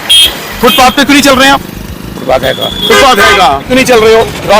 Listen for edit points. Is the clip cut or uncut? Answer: cut